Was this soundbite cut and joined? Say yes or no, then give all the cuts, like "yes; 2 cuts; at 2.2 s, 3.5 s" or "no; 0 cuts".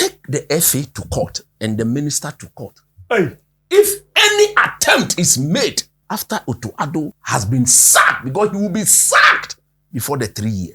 yes; 2 cuts; at 5.9 s, 7.2 s